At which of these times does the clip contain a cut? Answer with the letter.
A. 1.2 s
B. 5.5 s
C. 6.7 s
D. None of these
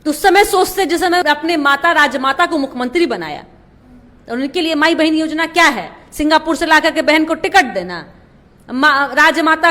A